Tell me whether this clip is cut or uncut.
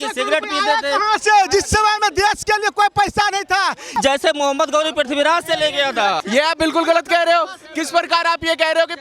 cut